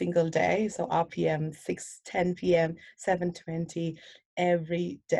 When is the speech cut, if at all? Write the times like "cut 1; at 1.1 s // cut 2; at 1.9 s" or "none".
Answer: cut 1; at 3.7 s